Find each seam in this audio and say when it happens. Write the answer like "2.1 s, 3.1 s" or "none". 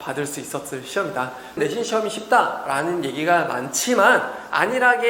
1.6 s